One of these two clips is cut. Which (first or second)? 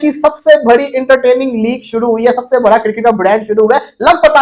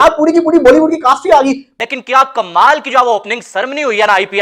second